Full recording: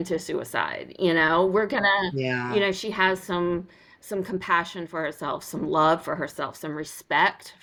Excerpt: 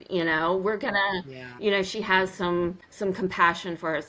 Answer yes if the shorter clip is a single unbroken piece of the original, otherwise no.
no